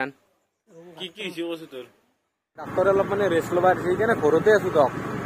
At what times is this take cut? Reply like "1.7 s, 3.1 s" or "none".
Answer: 2.7 s